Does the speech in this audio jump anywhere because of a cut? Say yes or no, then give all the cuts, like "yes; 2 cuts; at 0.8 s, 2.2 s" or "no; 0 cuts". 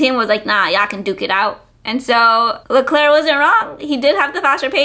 no; 0 cuts